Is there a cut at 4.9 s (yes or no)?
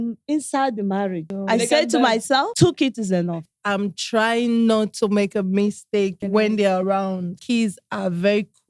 no